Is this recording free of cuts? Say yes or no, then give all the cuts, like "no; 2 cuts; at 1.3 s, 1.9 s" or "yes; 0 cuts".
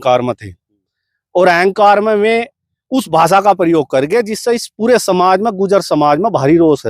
yes; 0 cuts